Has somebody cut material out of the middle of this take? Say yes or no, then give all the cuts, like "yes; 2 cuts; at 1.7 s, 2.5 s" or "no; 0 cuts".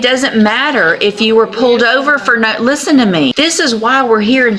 yes; 1 cut; at 3.3 s